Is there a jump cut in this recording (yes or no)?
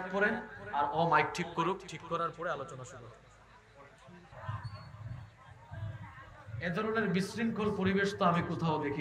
yes